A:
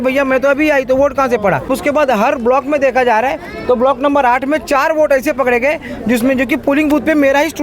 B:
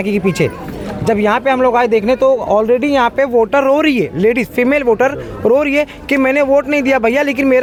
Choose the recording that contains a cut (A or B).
A